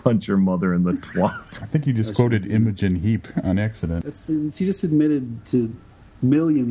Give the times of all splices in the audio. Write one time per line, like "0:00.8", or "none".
0:01.5
0:04.1